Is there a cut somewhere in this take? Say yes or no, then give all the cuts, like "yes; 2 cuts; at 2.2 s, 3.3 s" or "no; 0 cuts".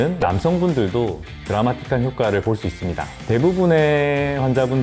yes; 1 cut; at 3.1 s